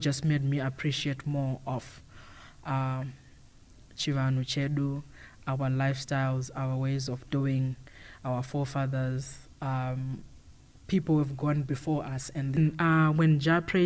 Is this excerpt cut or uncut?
cut